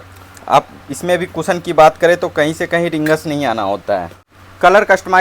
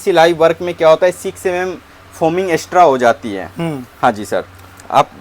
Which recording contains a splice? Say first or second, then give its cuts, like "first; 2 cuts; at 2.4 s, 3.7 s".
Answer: first; 1 cut; at 4.2 s